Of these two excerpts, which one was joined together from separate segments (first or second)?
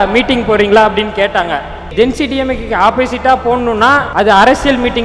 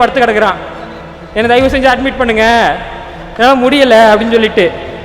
first